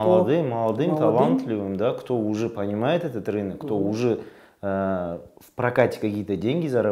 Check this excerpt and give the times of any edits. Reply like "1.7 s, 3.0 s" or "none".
none